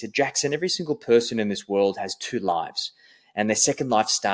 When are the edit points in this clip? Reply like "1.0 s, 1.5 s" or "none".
none